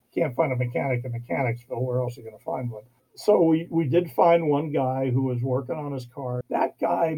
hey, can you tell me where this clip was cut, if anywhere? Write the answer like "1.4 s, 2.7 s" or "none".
none